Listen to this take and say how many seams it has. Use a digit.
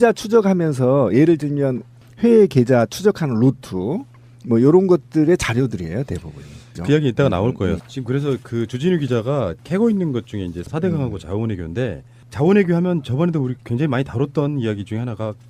1